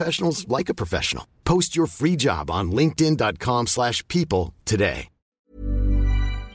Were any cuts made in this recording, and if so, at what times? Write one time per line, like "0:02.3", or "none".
0:05.5